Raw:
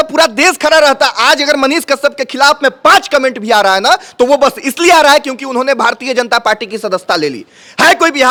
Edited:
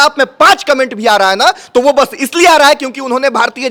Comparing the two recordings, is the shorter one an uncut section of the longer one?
yes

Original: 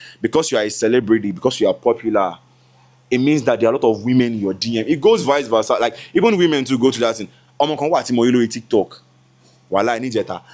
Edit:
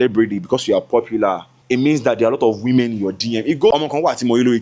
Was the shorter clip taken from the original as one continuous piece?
no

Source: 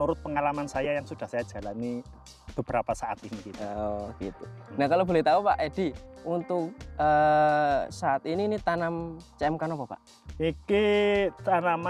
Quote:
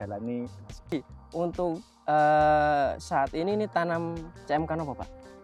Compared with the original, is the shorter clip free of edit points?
no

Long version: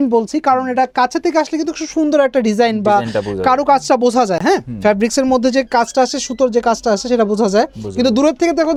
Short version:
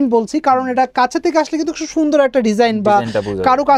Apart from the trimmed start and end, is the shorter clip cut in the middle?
no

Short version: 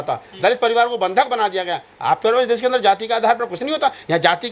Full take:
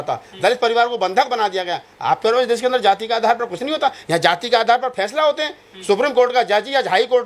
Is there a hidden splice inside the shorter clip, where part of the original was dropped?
no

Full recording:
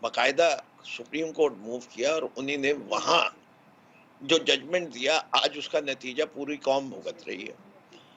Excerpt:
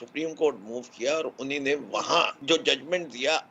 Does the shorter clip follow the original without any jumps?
no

